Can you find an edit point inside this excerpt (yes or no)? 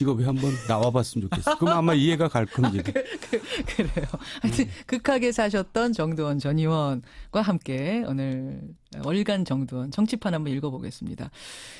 yes